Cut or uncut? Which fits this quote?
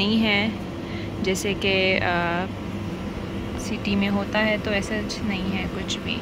uncut